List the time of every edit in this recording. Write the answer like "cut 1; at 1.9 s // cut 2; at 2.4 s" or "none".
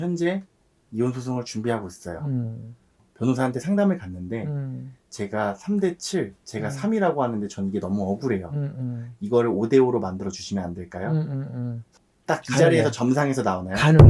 cut 1; at 11.8 s